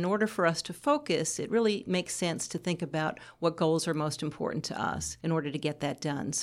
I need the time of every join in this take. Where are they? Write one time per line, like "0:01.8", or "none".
0:05.1